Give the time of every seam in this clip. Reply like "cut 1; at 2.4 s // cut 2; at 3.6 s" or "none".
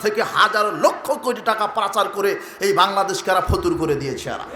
none